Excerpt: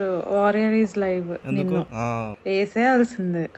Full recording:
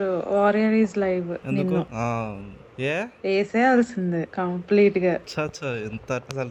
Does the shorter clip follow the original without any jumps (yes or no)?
no